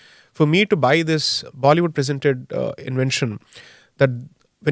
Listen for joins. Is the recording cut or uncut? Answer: uncut